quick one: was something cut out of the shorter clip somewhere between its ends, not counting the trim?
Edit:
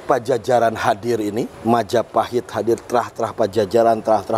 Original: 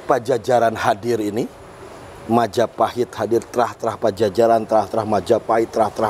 yes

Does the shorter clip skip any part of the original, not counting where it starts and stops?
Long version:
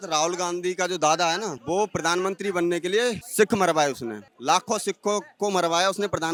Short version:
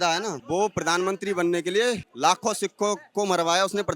yes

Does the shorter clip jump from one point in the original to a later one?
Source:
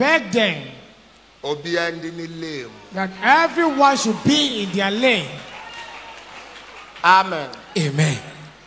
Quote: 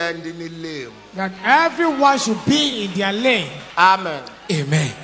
yes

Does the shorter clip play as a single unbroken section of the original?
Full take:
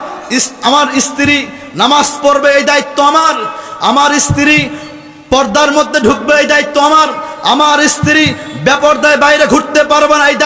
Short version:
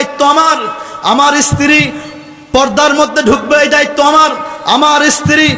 yes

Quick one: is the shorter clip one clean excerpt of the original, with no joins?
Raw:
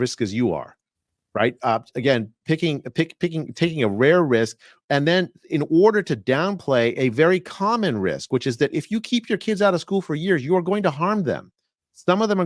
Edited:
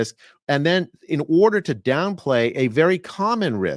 yes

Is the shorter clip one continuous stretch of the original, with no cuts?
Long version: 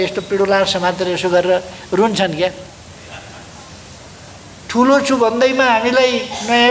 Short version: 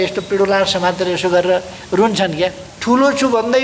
no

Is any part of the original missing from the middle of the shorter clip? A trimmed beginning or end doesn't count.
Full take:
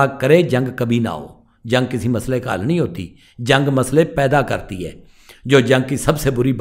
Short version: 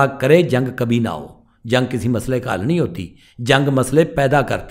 no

